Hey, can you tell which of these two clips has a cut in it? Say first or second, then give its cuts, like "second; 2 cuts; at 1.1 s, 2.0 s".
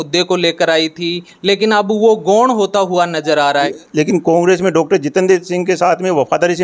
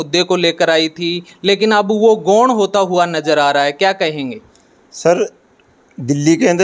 first; 1 cut; at 3.7 s